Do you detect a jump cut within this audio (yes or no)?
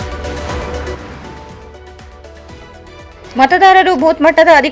no